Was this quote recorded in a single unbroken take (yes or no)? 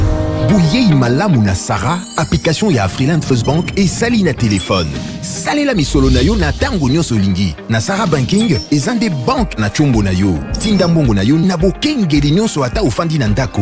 yes